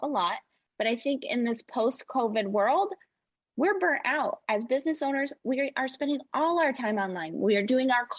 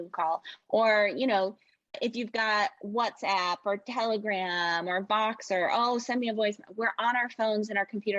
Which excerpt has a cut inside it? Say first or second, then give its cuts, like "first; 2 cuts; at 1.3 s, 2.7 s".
second; 1 cut; at 1.9 s